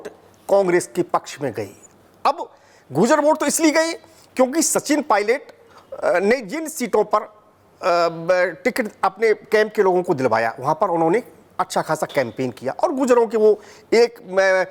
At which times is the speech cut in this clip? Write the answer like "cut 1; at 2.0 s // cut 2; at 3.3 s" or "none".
none